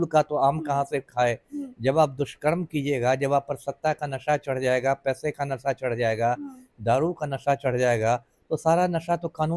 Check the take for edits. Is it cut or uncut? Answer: uncut